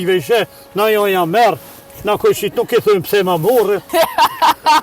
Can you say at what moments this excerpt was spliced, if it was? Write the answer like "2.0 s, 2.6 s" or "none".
3.9 s